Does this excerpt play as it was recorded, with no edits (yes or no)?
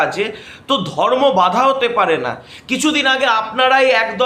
yes